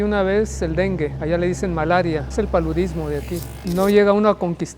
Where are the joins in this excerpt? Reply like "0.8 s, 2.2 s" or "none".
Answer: 1.2 s, 2.3 s, 3.5 s